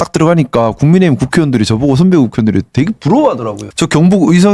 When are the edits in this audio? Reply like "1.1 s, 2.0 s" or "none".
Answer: 3.6 s